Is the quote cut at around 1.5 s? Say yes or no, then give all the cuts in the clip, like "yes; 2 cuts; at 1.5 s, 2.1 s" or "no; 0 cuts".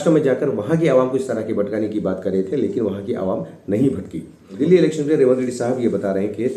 no; 1 cut; at 4.5 s